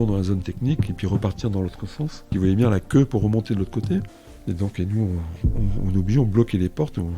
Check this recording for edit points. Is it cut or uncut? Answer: cut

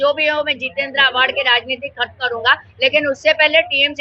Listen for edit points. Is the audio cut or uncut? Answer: uncut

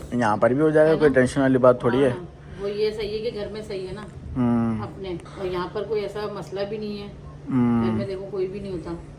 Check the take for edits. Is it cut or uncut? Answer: uncut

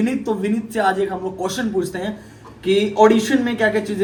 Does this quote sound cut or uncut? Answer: uncut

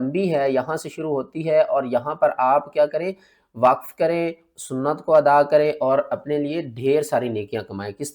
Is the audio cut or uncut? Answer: uncut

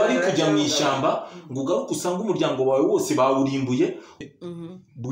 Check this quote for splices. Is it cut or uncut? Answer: cut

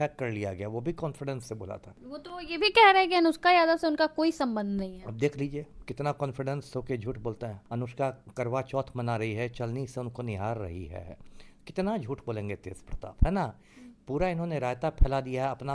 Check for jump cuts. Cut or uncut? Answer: cut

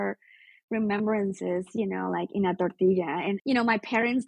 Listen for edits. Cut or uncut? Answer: cut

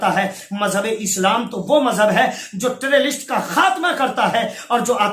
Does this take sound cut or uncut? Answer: uncut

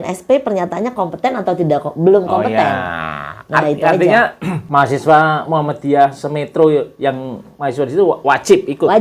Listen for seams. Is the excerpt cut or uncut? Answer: cut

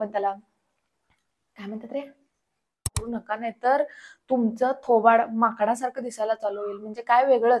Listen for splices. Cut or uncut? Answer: cut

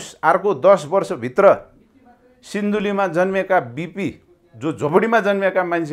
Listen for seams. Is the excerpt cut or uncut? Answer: uncut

